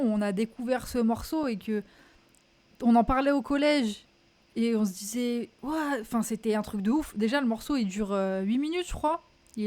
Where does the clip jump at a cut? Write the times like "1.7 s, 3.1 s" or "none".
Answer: none